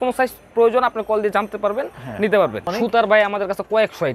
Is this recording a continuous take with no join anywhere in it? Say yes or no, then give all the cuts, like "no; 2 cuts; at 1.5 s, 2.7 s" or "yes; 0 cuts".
no; 1 cut; at 2.6 s